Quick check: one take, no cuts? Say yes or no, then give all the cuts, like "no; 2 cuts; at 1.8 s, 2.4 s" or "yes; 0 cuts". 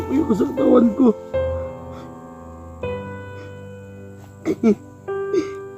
no; 3 cuts; at 1.2 s, 3.0 s, 4.3 s